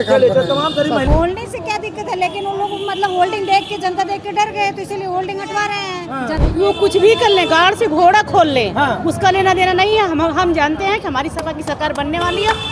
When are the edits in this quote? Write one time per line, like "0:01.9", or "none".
0:01.1
0:06.4